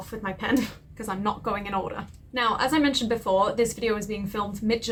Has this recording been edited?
no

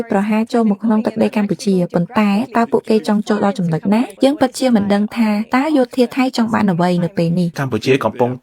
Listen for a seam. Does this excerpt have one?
yes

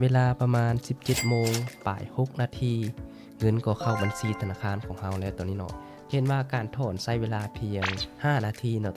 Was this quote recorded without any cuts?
no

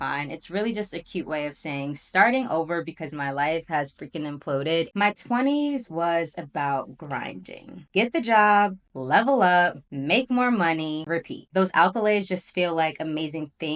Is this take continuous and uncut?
no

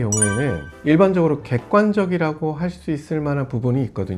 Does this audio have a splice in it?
no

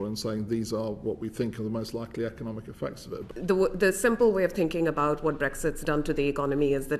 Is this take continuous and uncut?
no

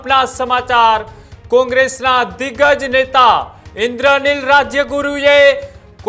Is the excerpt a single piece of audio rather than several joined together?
yes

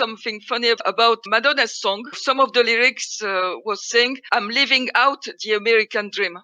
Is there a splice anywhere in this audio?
yes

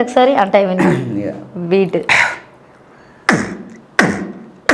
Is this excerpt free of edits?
yes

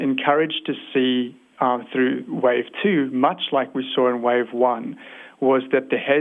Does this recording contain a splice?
no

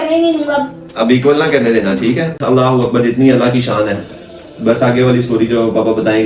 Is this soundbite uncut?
no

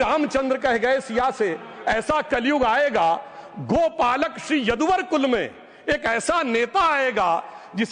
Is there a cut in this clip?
no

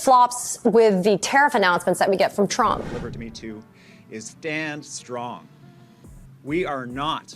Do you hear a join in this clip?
yes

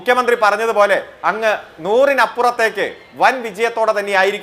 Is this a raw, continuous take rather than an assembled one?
yes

